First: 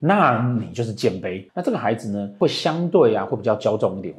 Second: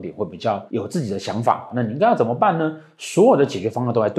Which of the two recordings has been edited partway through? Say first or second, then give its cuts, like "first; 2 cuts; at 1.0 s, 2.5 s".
first; 2 cuts; at 1.4 s, 2.4 s